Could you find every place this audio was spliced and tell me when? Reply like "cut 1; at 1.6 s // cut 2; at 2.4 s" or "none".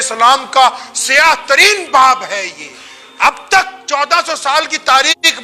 none